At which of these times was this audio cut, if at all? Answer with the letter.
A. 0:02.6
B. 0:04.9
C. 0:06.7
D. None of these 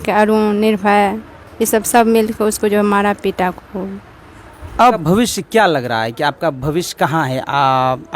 B